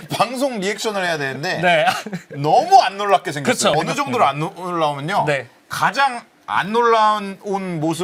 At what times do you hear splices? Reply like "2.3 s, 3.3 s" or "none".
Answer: none